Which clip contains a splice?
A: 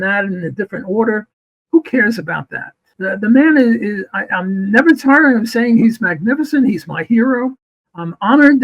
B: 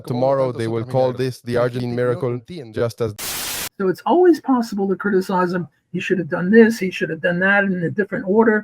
B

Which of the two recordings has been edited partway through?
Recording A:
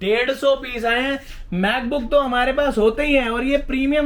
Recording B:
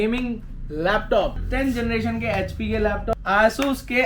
B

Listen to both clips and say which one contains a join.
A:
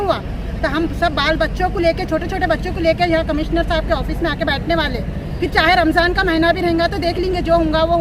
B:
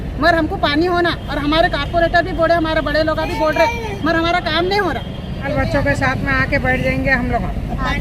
B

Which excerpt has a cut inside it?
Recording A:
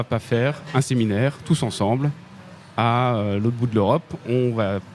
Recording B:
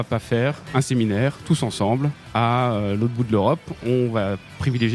B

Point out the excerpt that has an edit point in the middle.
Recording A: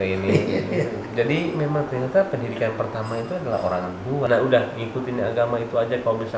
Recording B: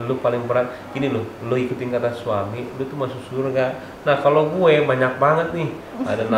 A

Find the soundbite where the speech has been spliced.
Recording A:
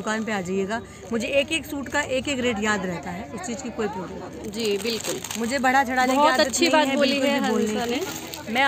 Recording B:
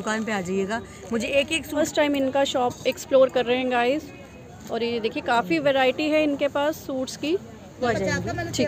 B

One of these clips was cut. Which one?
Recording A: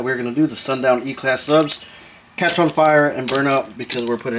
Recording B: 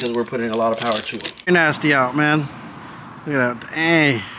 B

